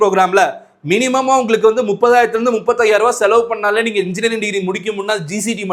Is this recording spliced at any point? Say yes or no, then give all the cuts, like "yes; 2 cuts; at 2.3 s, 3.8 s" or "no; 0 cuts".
no; 0 cuts